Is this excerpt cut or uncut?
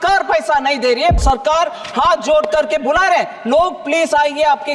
cut